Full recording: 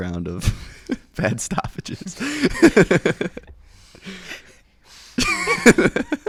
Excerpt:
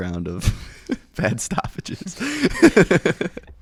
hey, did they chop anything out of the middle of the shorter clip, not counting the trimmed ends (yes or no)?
no